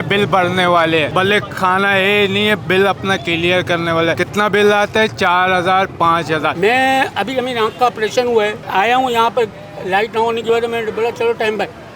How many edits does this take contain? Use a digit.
2